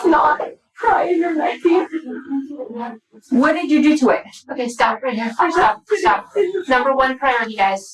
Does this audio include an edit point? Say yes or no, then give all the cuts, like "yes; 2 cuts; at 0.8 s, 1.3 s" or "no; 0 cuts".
no; 0 cuts